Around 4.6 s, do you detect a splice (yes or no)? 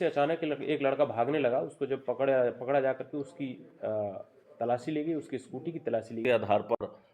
no